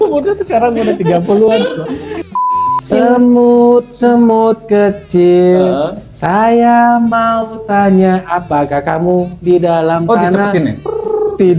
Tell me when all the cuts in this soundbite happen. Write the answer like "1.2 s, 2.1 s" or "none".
2.4 s